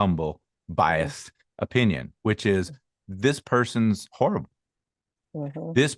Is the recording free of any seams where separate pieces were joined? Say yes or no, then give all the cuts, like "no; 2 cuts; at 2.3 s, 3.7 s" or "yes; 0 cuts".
yes; 0 cuts